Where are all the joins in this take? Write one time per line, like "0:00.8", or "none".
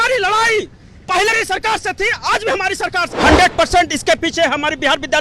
0:01.3
0:03.0